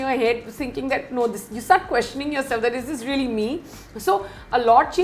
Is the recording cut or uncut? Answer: uncut